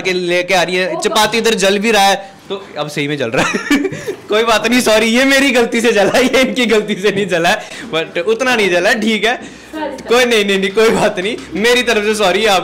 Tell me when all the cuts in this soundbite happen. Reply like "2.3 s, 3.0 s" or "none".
none